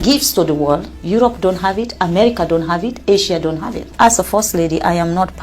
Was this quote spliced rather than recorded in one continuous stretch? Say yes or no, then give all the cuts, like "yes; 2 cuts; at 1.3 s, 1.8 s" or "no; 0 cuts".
yes; 2 cuts; at 0.9 s, 3.9 s